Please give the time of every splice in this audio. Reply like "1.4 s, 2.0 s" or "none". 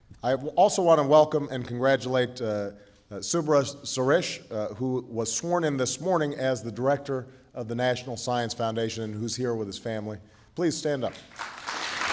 7.4 s